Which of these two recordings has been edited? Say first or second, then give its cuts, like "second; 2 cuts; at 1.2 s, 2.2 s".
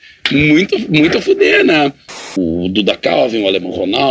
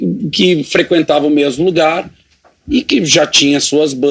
first; 1 cut; at 2.3 s